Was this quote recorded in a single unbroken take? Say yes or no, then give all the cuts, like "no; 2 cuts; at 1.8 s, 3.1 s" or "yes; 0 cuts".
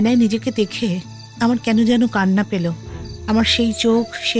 yes; 0 cuts